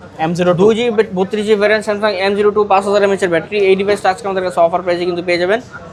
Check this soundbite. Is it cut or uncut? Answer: uncut